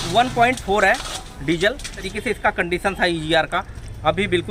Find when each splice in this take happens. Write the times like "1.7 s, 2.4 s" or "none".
2.0 s